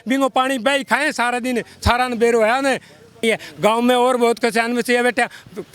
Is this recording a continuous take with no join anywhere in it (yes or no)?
no